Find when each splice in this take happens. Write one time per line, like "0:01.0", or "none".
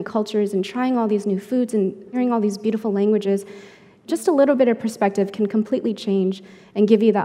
0:02.1
0:04.0